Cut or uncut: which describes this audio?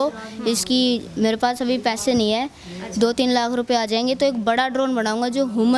uncut